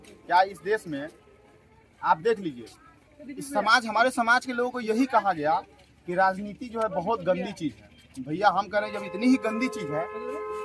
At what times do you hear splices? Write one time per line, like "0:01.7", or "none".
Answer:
none

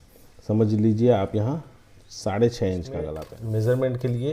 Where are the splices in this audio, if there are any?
0:03.2

